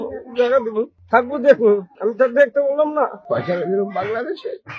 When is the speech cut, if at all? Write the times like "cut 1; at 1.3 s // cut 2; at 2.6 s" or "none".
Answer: cut 1; at 1.0 s // cut 2; at 2.0 s // cut 3; at 3.2 s